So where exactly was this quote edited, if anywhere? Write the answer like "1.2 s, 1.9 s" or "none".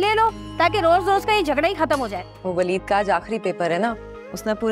2.3 s